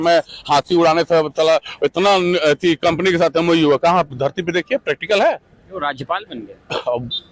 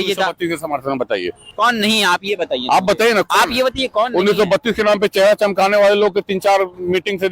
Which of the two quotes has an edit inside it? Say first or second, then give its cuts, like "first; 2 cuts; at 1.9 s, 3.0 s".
second; 1 cut; at 1.4 s